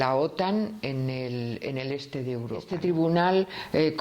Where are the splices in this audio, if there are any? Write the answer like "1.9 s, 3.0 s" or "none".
2.7 s

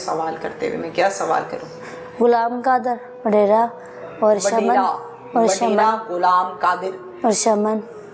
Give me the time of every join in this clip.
none

